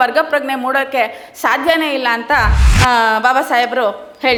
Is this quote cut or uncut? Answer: uncut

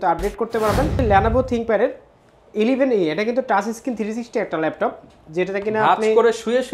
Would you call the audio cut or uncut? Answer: cut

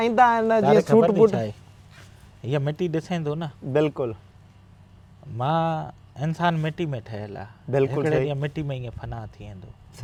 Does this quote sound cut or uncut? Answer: uncut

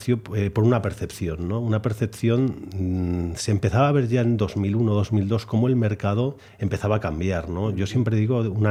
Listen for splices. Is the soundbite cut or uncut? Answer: uncut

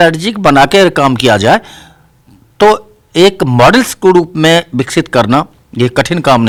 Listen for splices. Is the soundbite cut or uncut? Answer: uncut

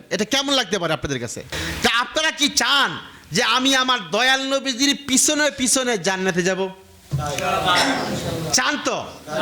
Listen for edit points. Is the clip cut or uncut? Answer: uncut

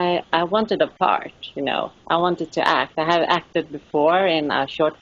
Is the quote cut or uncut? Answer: uncut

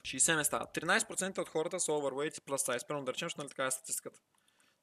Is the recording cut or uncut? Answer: uncut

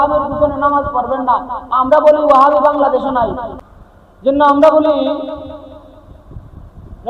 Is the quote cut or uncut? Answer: cut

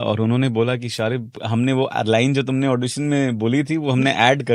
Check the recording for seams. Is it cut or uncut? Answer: cut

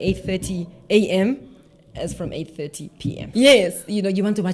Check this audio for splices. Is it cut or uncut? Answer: cut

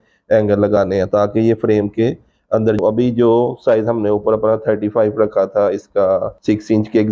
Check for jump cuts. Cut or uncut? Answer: cut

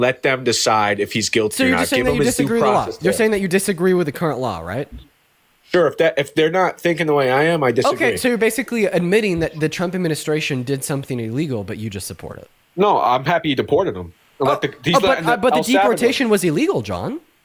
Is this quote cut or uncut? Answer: uncut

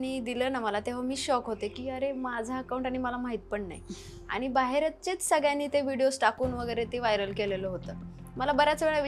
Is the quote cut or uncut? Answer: uncut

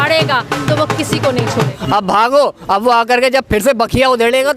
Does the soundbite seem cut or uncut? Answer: cut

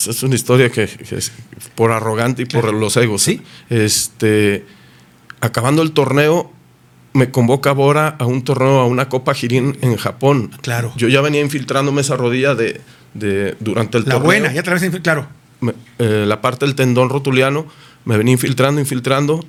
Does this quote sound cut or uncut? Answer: uncut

